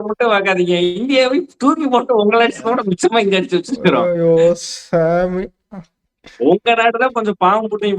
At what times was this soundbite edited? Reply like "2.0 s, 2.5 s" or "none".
none